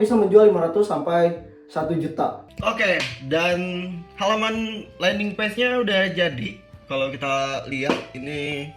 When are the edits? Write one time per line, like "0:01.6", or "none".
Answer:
0:02.5